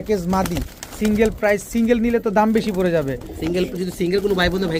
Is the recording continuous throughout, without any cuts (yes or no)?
yes